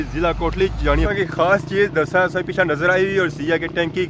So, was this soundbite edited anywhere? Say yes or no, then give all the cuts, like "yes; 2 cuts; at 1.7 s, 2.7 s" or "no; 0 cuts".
yes; 1 cut; at 1.0 s